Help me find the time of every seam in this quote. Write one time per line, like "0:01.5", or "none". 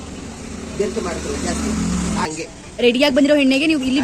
0:02.3